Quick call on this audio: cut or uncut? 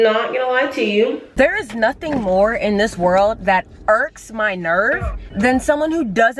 cut